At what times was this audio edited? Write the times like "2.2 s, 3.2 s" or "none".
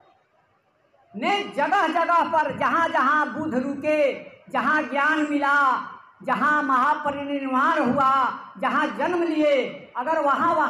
none